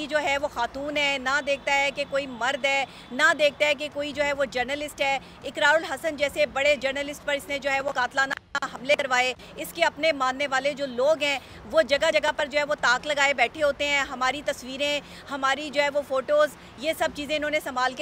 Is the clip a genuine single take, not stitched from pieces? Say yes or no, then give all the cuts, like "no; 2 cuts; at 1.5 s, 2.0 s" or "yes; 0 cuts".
yes; 0 cuts